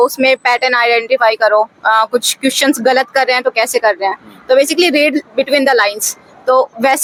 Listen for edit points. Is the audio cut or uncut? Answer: uncut